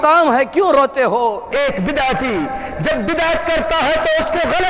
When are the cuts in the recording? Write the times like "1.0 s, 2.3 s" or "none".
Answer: 1.5 s